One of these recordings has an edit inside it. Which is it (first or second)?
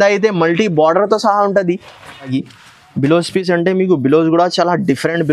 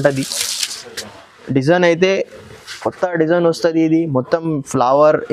first